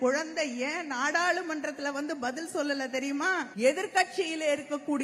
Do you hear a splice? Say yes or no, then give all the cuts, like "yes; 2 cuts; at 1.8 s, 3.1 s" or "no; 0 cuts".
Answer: yes; 1 cut; at 3.5 s